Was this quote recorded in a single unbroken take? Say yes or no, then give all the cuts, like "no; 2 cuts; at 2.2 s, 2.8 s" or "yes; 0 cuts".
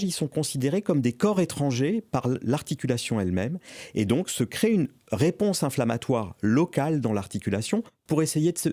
yes; 0 cuts